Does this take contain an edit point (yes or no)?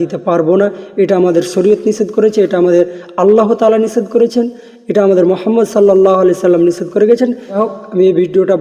yes